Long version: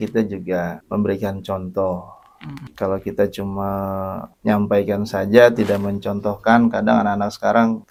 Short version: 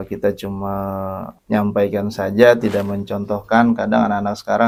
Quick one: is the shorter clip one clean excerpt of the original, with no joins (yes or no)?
yes